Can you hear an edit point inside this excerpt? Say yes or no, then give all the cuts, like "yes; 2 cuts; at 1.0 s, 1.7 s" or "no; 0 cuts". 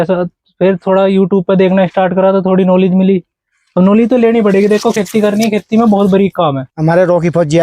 yes; 1 cut; at 6.7 s